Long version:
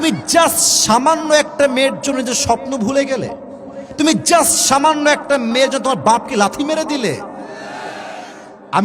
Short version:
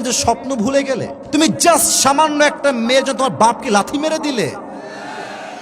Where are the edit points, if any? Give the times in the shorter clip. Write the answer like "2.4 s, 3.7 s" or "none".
1.2 s